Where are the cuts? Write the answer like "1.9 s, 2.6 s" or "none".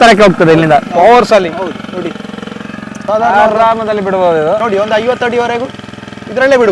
3.0 s, 4.6 s